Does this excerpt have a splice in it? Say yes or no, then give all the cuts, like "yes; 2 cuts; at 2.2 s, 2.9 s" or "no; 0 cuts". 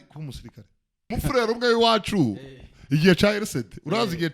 yes; 1 cut; at 1.1 s